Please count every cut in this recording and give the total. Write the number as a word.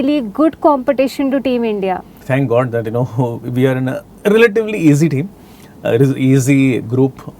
zero